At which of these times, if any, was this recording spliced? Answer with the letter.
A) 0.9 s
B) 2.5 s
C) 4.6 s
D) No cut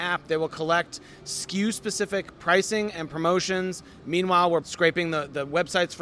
C